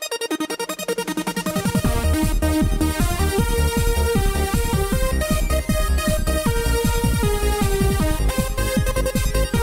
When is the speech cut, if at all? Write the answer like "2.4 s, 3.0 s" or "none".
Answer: 1.0 s